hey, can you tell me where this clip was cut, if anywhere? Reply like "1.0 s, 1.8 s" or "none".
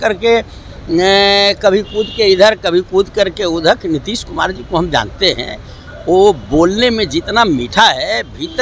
none